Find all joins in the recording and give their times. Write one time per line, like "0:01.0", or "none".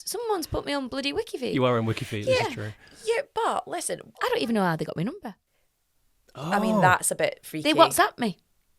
0:04.2